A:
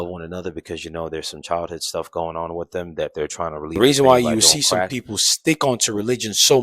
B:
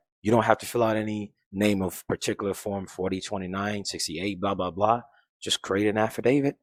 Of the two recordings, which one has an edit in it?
A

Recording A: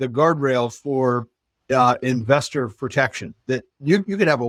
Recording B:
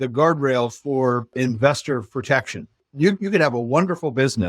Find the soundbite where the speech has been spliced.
B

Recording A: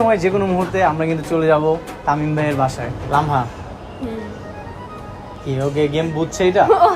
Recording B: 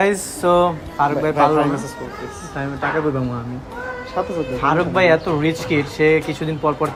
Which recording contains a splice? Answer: A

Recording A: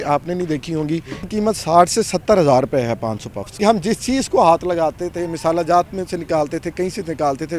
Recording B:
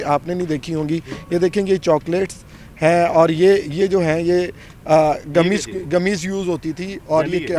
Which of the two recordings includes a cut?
A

